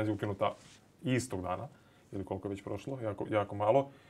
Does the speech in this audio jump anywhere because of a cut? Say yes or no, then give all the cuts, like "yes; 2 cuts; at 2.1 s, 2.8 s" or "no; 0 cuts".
no; 0 cuts